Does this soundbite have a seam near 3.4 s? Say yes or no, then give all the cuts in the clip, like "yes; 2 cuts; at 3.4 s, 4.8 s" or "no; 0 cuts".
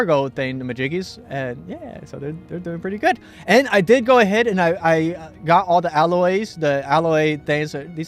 yes; 1 cut; at 3.4 s